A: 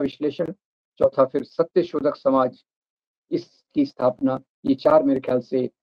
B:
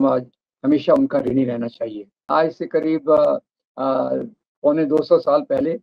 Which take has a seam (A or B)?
B